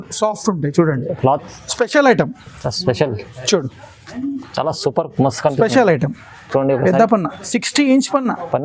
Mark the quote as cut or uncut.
cut